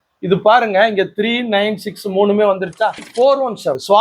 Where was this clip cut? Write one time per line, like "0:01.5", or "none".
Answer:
0:03.1

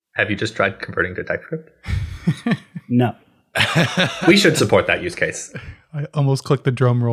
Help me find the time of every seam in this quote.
none

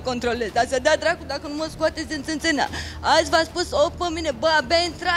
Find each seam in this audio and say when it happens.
none

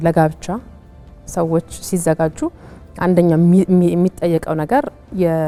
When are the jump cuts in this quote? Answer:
none

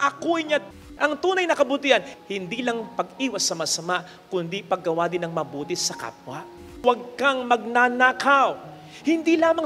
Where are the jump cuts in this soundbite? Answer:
0:00.8
0:02.1
0:06.6

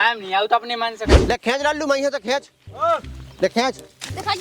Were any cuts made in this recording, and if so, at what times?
0:01.1

